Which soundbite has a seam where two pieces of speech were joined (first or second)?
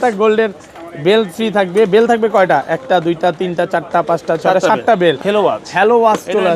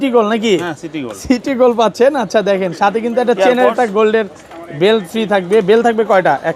first